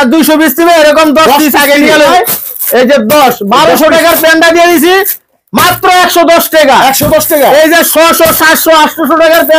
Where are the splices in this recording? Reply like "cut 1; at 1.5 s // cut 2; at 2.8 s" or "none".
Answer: cut 1; at 2.1 s